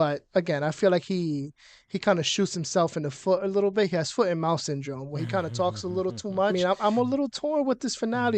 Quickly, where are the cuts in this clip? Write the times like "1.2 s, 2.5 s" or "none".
6.5 s